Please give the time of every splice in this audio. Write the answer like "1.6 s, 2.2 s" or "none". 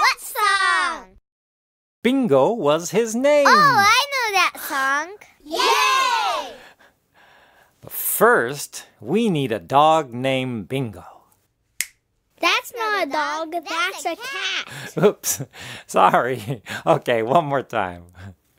13.8 s